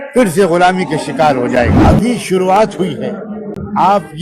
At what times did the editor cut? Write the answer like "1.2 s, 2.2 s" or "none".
1.7 s